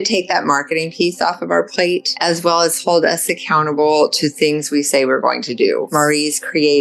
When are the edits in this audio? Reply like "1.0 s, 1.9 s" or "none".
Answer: 2.1 s, 5.9 s